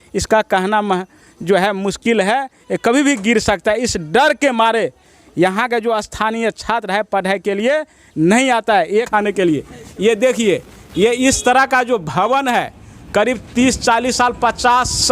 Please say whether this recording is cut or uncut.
cut